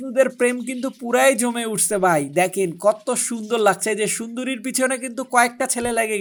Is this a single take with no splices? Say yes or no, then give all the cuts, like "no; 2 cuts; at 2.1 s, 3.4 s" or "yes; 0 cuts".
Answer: yes; 0 cuts